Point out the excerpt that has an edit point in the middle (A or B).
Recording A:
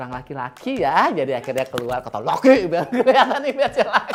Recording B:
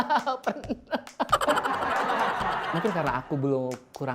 B